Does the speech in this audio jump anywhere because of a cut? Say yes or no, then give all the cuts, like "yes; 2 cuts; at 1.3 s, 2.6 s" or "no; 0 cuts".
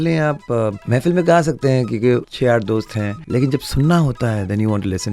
yes; 3 cuts; at 0.8 s, 2.3 s, 3.2 s